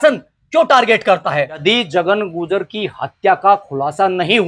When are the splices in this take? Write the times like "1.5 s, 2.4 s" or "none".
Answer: 1.6 s

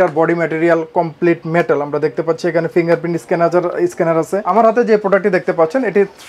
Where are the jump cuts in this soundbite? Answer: 4.4 s

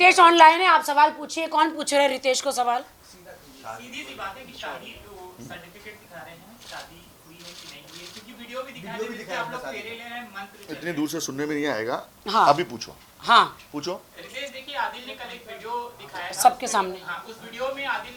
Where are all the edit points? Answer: none

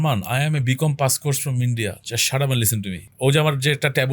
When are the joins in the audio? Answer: 3.0 s

